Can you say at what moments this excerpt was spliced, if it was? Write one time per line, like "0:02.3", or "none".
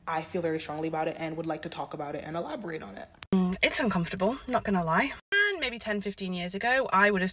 0:03.3